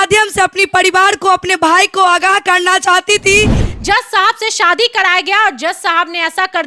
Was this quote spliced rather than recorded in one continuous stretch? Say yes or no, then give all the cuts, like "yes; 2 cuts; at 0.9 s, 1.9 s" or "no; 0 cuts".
yes; 1 cut; at 3.7 s